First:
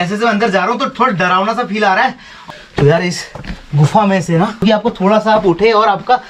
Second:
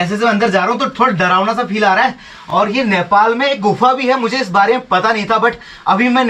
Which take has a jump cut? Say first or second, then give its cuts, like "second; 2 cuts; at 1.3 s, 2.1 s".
first; 2 cuts; at 2.3 s, 4.6 s